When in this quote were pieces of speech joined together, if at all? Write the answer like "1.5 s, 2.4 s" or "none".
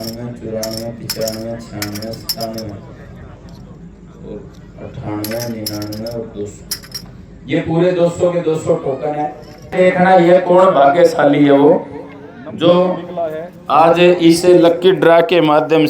9.7 s